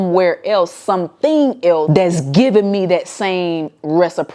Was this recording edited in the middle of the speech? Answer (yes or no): yes